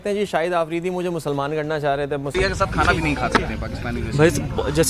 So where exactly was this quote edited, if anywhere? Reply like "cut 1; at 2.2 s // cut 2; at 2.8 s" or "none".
cut 1; at 2.3 s